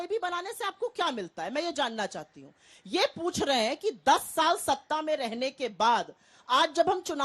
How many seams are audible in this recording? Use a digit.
1